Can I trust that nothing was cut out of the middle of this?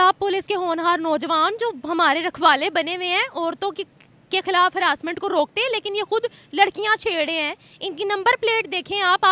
yes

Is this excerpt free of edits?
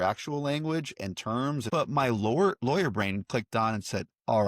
no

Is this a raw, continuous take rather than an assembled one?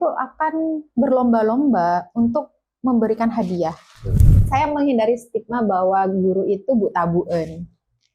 no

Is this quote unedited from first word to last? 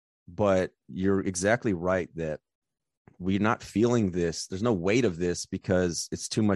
yes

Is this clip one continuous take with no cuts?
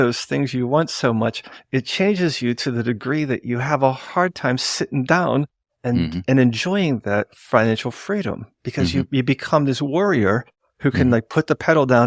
yes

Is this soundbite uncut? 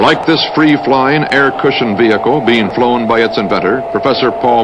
yes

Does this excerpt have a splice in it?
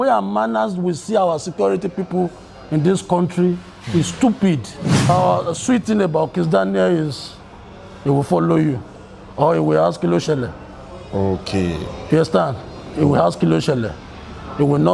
yes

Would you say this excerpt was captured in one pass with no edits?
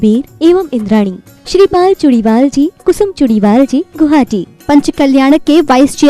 no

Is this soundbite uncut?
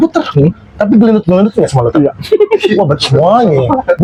yes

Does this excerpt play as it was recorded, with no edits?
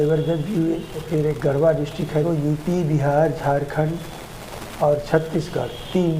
no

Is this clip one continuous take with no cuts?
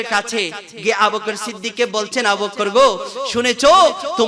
yes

